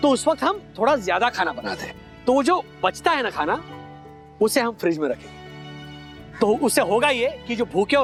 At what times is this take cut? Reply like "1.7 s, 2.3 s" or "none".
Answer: none